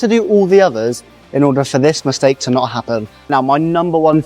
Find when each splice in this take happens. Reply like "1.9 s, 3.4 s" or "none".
3.1 s